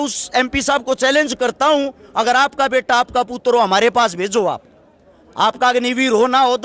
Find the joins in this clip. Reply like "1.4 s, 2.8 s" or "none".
none